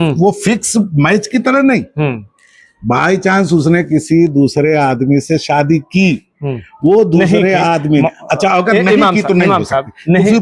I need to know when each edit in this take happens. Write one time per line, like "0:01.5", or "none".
none